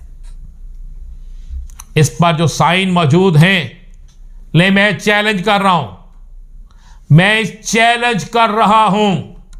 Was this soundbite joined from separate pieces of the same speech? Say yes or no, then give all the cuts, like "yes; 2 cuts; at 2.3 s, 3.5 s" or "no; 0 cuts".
no; 0 cuts